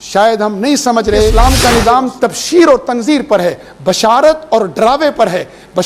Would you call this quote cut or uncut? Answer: cut